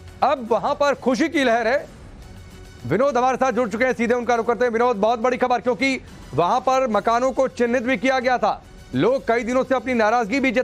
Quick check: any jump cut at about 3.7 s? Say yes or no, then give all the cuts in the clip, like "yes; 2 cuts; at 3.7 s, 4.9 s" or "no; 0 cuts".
yes; 1 cut; at 3.7 s